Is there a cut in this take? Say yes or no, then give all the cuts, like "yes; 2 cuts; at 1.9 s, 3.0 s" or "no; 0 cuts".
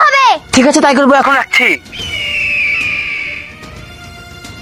no; 0 cuts